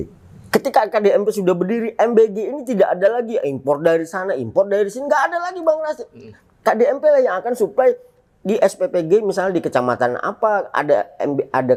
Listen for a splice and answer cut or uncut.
uncut